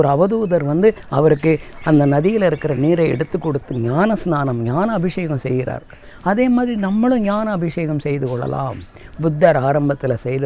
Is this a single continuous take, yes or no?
no